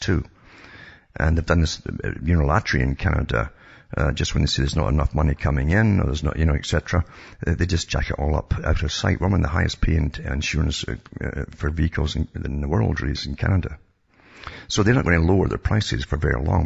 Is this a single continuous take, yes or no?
no